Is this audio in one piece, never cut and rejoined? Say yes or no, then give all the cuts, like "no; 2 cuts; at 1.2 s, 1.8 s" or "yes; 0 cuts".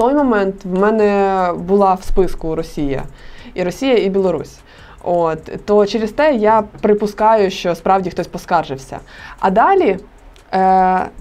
yes; 0 cuts